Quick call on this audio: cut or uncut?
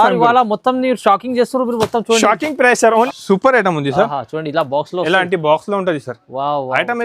cut